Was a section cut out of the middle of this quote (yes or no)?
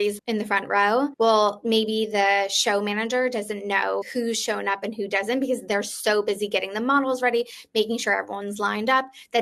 no